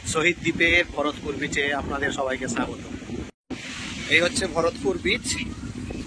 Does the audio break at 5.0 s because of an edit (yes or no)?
no